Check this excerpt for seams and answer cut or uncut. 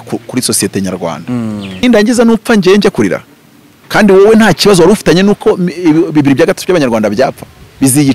cut